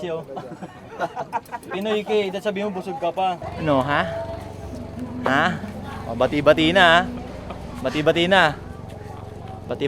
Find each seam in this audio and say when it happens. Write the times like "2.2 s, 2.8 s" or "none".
3.4 s